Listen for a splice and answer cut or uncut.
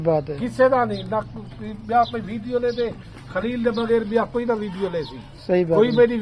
uncut